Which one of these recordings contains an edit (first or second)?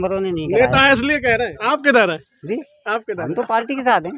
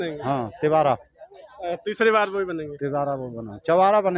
first